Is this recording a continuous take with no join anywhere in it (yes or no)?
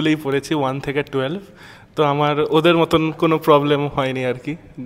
yes